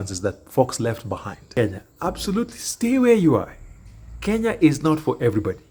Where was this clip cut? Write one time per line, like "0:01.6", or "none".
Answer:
0:01.5